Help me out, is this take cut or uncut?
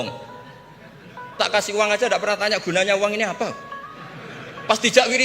cut